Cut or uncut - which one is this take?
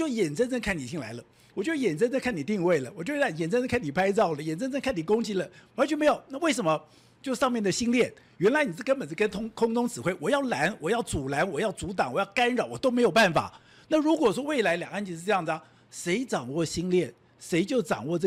uncut